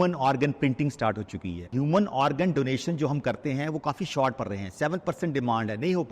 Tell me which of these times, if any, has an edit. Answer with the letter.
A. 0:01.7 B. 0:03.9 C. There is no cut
A